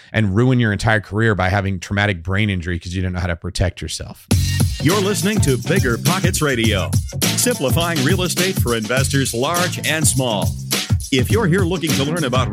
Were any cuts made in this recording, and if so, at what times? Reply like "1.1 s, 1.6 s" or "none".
4.1 s

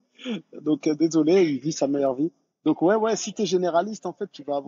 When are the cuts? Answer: none

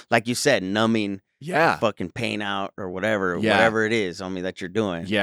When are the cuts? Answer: none

